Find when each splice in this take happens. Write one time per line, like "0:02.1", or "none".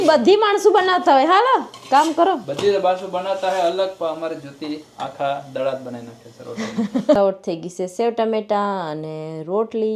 0:07.2